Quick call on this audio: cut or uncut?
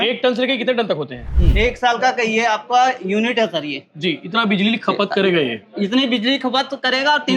cut